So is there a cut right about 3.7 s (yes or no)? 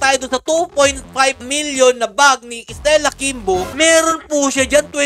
yes